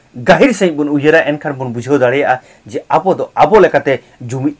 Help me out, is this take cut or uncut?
uncut